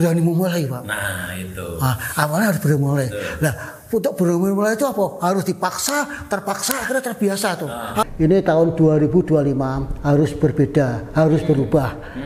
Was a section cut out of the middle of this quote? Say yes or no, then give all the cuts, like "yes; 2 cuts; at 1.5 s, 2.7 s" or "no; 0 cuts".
yes; 1 cut; at 8.0 s